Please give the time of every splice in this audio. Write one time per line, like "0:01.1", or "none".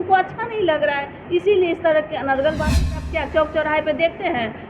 0:02.8